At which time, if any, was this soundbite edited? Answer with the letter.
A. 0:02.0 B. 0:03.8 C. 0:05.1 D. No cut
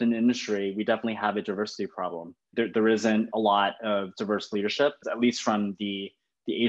C